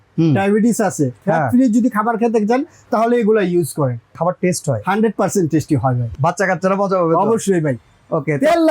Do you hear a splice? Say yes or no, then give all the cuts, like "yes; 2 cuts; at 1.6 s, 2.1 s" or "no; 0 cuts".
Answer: yes; 3 cuts; at 1.2 s, 4.1 s, 6.0 s